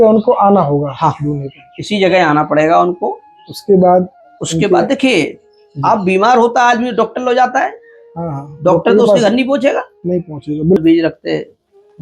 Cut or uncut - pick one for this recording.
cut